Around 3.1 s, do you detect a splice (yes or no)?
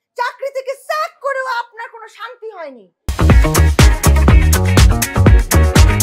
yes